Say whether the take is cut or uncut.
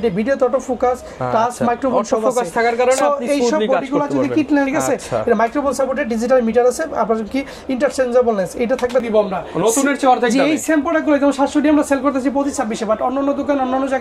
cut